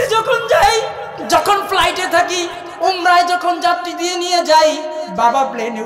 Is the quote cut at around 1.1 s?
yes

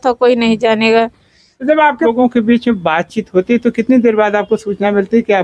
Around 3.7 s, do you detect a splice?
no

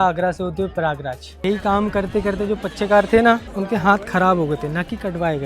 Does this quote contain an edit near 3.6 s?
yes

